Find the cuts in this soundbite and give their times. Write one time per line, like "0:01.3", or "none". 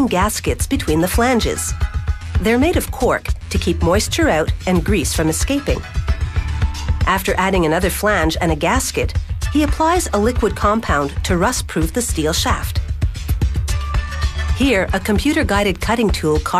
none